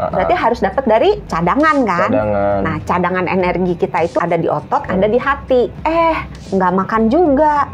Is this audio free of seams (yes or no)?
no